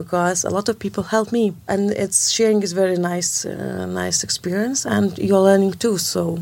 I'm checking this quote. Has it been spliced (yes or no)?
yes